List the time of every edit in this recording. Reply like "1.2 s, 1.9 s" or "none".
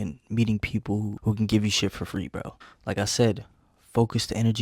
2.5 s